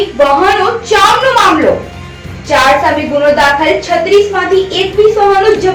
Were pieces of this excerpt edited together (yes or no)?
no